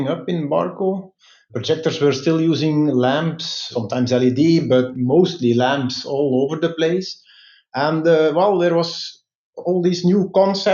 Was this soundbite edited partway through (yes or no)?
yes